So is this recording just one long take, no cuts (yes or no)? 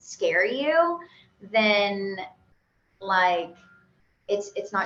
yes